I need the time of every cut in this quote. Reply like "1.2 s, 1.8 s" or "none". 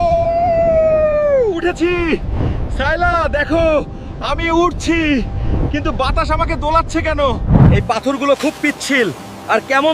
7.5 s